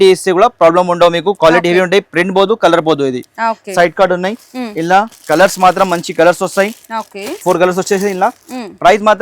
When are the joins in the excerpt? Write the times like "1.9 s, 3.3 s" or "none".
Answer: none

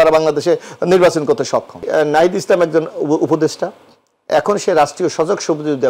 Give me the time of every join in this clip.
1.9 s

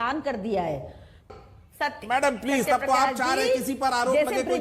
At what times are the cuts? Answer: 1.3 s

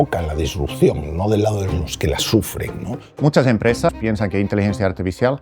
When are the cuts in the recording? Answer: 3.1 s

